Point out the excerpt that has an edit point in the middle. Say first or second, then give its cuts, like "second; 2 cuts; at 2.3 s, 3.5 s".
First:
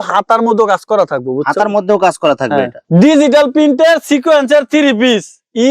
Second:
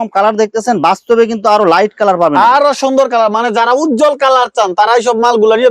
first; 1 cut; at 2.8 s